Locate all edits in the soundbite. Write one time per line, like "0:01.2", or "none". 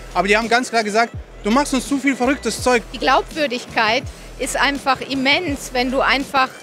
0:02.9